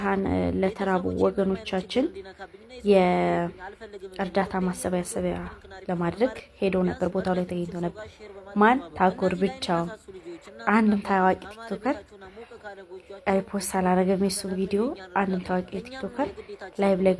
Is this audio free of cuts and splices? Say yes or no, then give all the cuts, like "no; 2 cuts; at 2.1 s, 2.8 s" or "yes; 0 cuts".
yes; 0 cuts